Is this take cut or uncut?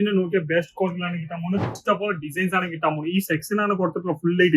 cut